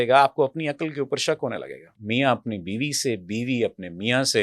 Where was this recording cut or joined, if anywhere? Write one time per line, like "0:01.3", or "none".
0:02.0